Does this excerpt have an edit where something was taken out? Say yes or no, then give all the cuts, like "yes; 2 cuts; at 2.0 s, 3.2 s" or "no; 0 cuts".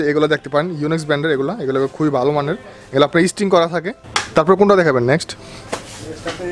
no; 0 cuts